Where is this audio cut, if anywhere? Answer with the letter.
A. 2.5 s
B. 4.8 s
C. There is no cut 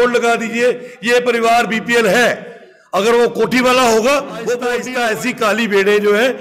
B